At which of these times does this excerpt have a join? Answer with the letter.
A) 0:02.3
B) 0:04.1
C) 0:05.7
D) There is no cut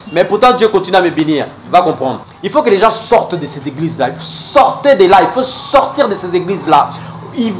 A